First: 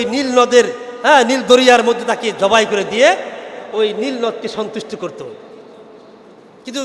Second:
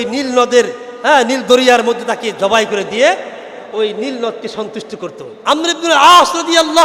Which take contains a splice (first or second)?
second